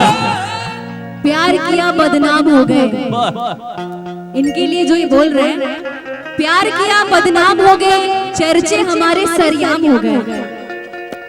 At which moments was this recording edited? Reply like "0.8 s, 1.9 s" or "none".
1.1 s